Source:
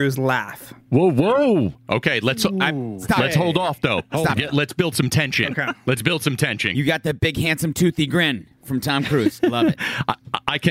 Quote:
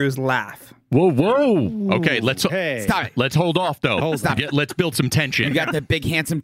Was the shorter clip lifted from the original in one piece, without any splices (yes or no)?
no